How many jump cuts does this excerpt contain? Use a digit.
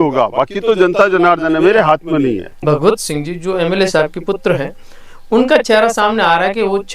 1